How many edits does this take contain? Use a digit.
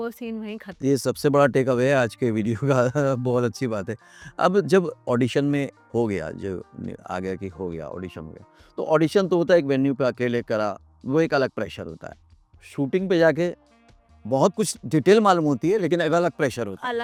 0